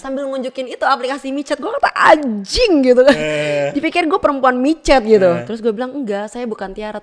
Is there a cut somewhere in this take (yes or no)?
no